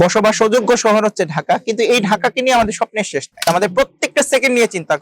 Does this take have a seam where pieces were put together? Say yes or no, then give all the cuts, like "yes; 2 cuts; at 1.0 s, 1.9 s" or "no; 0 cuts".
yes; 1 cut; at 3.3 s